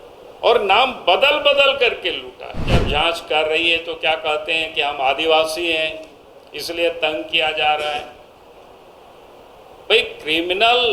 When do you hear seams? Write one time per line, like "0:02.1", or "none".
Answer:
0:02.8